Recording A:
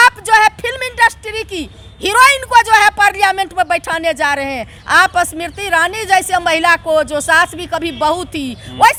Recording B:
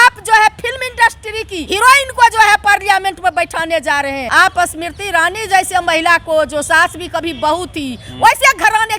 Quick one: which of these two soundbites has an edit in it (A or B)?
B